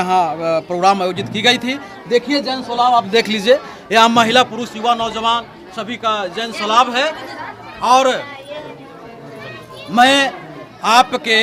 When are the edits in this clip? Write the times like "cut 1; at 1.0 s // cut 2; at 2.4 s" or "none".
none